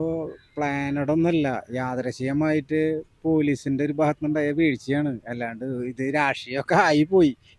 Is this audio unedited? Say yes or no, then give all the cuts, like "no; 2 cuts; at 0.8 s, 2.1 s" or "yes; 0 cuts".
yes; 0 cuts